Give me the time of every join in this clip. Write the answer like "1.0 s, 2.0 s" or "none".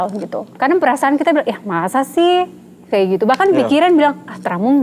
none